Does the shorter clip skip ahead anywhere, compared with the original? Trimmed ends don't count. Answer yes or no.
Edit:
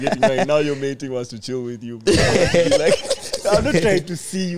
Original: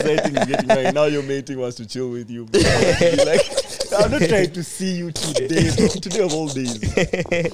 no